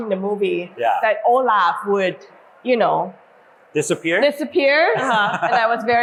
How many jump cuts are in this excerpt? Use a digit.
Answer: 0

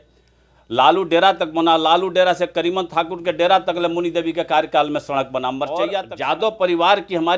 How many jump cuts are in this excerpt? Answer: 1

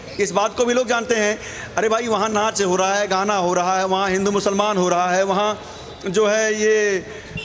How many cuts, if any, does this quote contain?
0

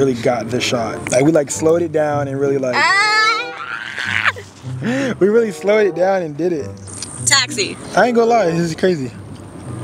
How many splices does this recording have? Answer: 1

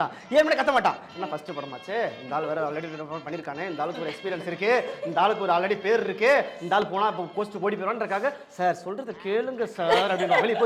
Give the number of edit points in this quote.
0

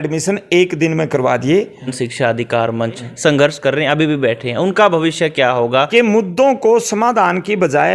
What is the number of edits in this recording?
3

